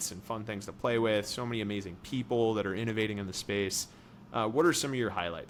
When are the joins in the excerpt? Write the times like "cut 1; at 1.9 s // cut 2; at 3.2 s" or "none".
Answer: none